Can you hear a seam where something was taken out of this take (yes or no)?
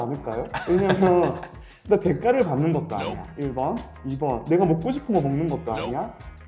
no